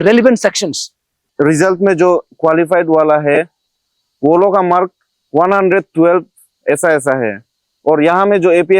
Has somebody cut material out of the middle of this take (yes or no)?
yes